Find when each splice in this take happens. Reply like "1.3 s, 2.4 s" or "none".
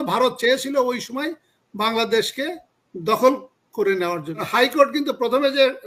4.4 s